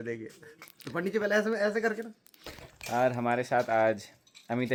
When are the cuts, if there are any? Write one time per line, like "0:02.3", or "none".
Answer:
none

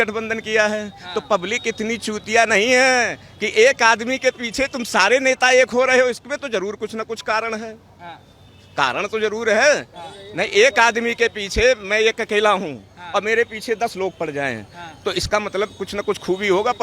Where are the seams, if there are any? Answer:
none

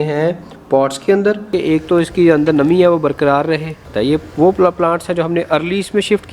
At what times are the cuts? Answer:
0:01.5
0:03.8

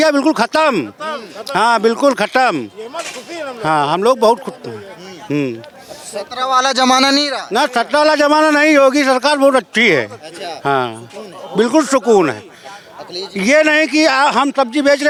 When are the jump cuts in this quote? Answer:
none

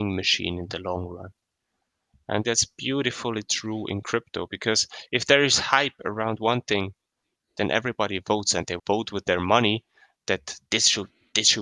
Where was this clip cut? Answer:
0:02.4

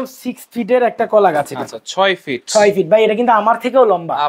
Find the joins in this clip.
none

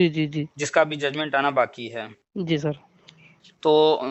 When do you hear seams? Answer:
none

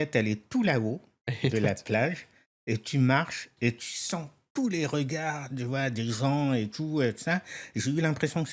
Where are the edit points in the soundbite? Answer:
none

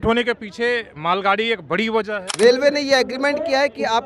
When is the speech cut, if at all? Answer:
0:02.2

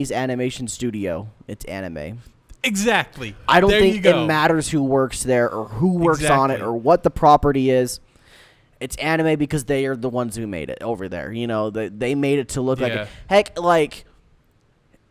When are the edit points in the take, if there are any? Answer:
none

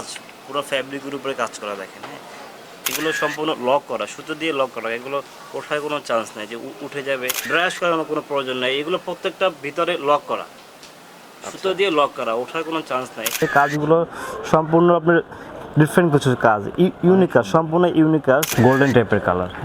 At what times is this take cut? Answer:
0:02.9
0:07.4
0:13.4
0:18.5

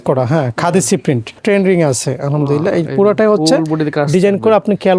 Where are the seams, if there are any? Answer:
0:01.4

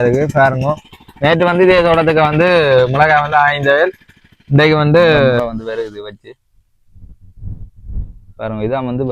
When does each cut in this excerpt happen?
0:05.4

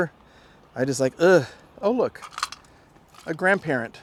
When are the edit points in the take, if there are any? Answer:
none

